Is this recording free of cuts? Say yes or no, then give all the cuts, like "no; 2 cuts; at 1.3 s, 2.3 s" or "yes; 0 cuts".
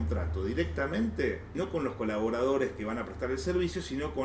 no; 1 cut; at 1.5 s